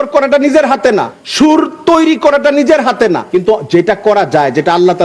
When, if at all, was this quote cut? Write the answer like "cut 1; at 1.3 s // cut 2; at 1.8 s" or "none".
cut 1; at 1.2 s // cut 2; at 3.2 s

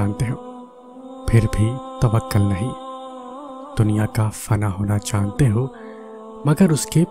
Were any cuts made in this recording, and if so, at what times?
none

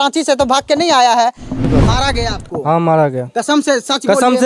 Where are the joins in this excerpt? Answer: cut 1; at 1.5 s

